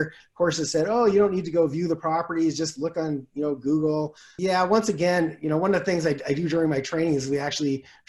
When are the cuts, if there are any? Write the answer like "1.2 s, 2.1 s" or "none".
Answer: 4.2 s